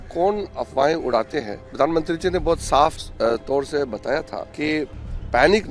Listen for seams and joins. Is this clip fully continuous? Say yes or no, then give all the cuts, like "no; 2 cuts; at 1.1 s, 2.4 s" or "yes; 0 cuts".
no; 3 cuts; at 1.6 s, 3.0 s, 4.4 s